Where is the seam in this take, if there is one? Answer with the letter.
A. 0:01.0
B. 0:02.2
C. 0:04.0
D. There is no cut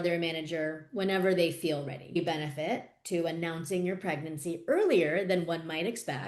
B